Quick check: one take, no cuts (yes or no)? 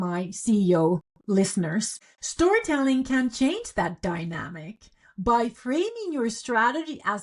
yes